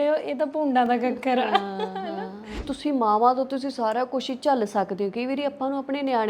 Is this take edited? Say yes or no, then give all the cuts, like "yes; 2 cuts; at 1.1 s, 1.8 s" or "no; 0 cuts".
yes; 1 cut; at 2.7 s